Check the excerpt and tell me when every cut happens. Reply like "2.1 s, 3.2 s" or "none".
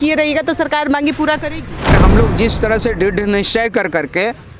2.0 s